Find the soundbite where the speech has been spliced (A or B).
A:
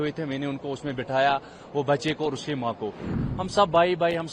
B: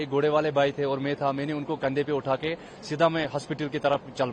A